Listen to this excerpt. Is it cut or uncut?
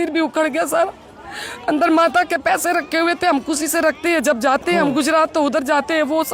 uncut